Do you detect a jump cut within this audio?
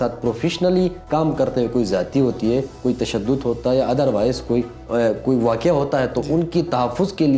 yes; 3 cuts; at 1.0 s, 2.7 s, 4.8 s

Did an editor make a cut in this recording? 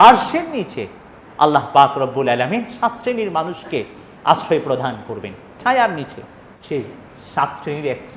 no; 0 cuts

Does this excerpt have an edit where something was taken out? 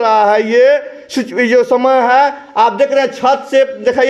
no; 0 cuts

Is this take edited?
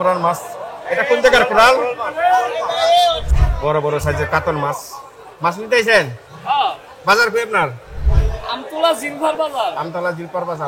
yes; 2 cuts; at 3.3 s, 8.0 s

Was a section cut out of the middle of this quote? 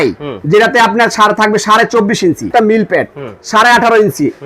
yes; 1 cut; at 2.5 s

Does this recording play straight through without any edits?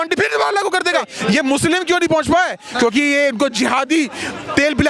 no; 1 cut; at 1.1 s

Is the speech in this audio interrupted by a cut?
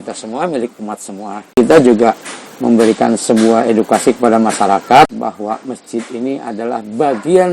yes; 2 cuts; at 1.6 s, 5.1 s

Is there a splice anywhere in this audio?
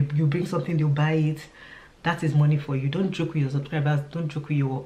no; 0 cuts

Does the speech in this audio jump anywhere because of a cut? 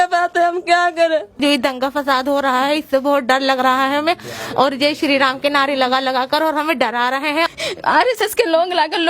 yes; 2 cuts; at 1.4 s, 7.5 s

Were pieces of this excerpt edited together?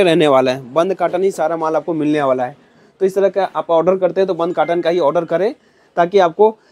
no; 0 cuts

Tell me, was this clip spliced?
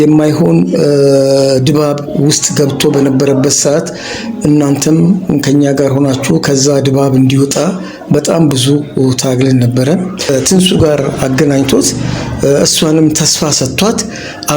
yes; 1 cut; at 10.3 s

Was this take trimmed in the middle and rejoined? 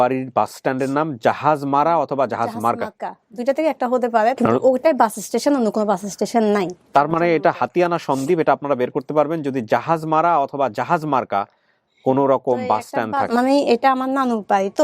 yes; 2 cuts; at 4.4 s, 13.3 s

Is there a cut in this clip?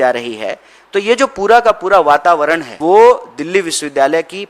yes; 1 cut; at 2.7 s

